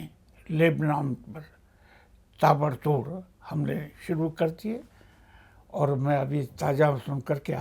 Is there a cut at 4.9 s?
no; 0 cuts

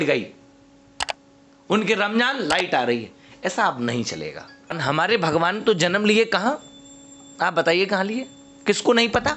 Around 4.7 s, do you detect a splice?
yes; 1 cut; at 4.7 s

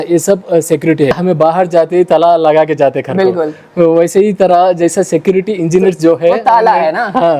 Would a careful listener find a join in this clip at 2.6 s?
no; 1 cut; at 1.1 s

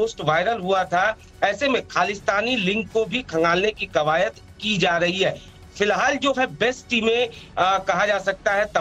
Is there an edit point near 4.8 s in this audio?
yes; 1 cut; at 4.8 s

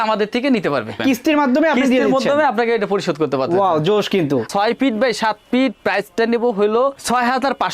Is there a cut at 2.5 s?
no; 2 cuts; at 1.0 s, 4.5 s

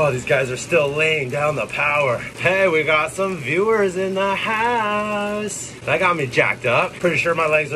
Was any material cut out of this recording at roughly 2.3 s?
yes; 3 cuts; at 2.3 s, 5.7 s, 6.9 s

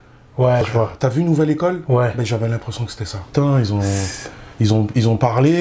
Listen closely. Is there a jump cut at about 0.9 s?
no; 1 cut; at 3.2 s

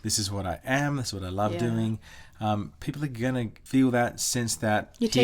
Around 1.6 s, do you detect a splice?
no; 1 cut; at 3.6 s

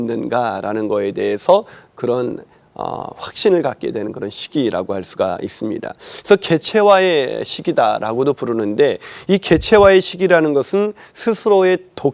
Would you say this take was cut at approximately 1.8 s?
no; 0 cuts

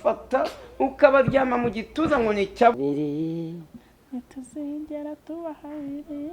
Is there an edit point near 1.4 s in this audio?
no; 1 cut; at 2.7 s

